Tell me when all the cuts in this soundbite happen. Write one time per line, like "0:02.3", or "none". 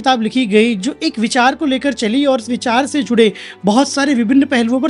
none